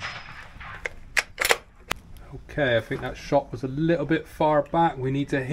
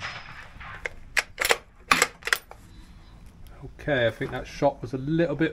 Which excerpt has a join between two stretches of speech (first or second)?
first